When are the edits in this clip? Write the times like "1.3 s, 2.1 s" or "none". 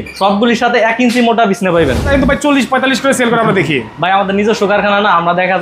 2.1 s